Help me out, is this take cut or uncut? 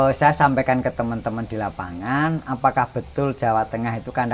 uncut